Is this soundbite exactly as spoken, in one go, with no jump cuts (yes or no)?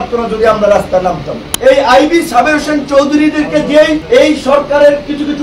no